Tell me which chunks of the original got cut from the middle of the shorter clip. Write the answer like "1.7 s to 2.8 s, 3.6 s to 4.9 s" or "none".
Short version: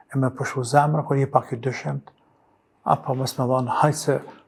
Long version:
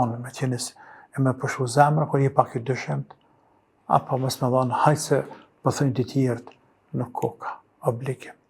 none